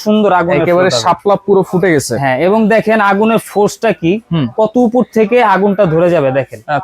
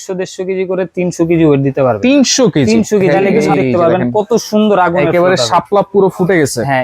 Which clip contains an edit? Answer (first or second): second